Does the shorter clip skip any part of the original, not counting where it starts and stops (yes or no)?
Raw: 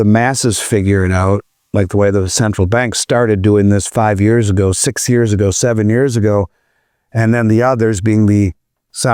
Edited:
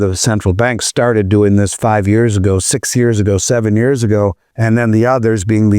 yes